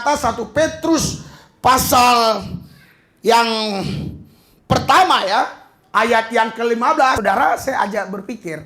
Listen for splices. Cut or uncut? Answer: cut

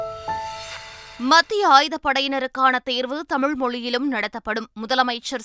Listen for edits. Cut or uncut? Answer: cut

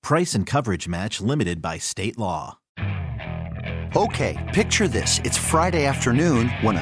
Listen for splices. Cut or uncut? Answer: cut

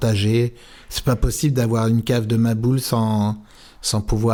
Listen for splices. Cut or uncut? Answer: uncut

